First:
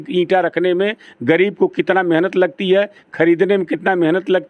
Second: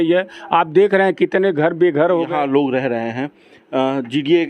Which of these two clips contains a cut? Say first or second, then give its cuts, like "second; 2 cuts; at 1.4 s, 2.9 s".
second; 1 cut; at 2.3 s